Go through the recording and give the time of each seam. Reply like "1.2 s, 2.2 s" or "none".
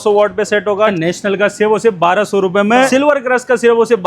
1.0 s, 2.9 s